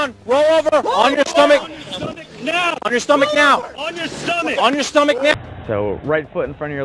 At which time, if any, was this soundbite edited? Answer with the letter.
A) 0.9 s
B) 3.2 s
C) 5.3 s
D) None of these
C